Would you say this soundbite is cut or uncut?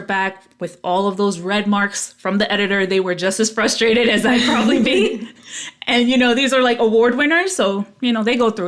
uncut